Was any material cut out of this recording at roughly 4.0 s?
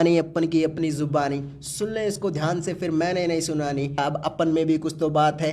yes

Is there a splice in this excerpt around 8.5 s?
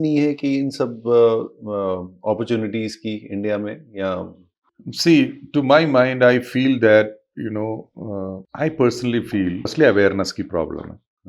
yes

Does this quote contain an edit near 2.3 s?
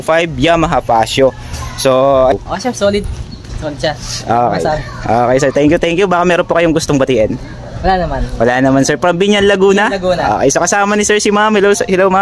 yes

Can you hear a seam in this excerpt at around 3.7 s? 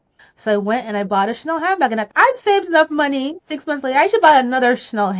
no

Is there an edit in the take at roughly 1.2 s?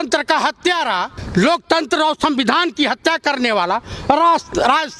yes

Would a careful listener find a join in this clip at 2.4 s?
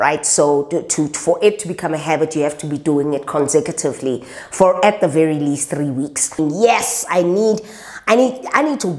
no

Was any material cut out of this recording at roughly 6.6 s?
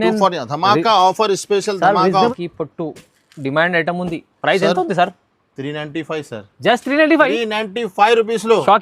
no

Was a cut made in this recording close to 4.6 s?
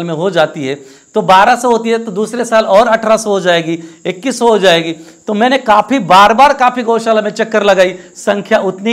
no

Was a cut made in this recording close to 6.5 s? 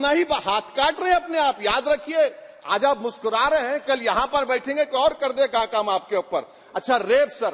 no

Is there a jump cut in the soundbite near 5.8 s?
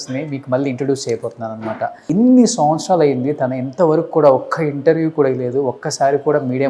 no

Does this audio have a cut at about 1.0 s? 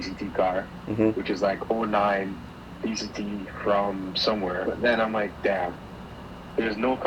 no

